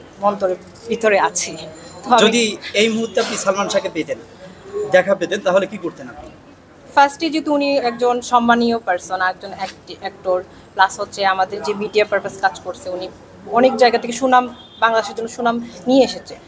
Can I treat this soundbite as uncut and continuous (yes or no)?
yes